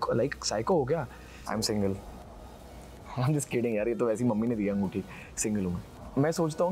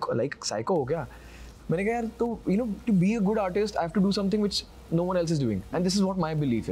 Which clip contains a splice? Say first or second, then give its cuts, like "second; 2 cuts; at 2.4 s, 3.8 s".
first; 2 cuts; at 1.4 s, 5.9 s